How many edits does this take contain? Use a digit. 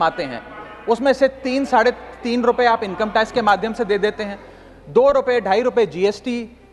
0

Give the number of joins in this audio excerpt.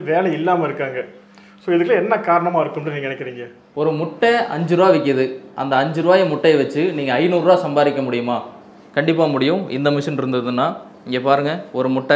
1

